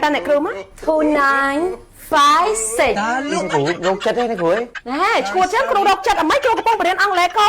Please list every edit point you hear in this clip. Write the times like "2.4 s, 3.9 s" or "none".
4.8 s

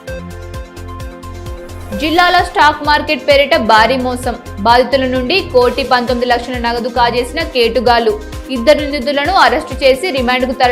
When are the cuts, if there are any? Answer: none

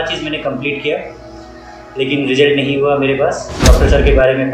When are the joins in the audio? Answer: 3.5 s

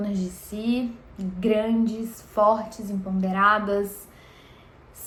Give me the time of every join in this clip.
none

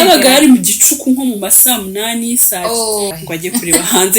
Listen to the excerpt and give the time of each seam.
3.1 s

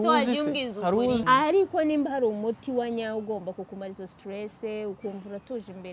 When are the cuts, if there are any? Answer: 1.2 s

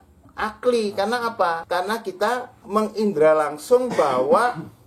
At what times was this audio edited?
1.6 s

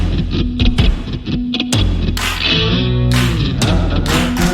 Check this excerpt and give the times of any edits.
none

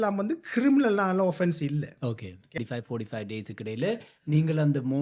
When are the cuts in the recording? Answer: 2.6 s

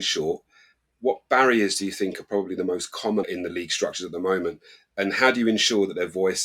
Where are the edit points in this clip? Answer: 3.2 s

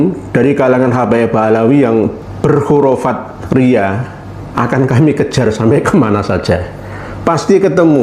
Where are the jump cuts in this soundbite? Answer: 2.2 s

